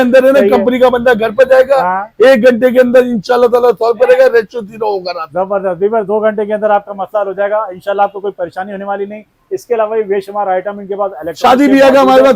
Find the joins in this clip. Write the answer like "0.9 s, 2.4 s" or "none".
none